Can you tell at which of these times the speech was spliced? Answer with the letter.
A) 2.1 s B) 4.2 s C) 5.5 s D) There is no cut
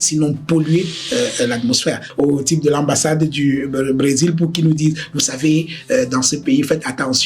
A